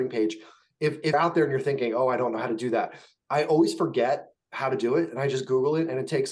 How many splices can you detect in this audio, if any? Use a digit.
1